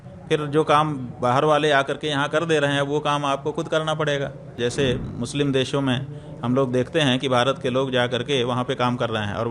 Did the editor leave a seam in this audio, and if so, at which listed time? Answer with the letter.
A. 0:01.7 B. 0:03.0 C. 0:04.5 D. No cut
C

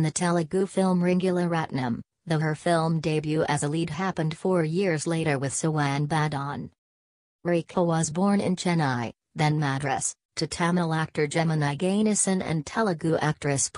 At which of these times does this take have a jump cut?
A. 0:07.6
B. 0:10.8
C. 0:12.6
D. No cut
C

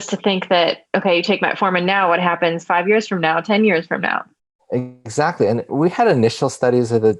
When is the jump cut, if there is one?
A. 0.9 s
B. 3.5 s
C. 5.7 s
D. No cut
C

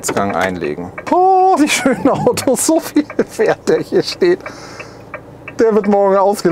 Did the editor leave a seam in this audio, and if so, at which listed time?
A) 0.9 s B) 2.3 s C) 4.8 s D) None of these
A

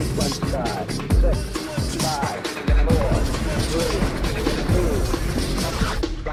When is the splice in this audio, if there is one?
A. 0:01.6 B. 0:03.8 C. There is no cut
C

